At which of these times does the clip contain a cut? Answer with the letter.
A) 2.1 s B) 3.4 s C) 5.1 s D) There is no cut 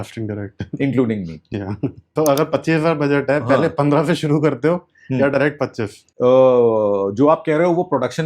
A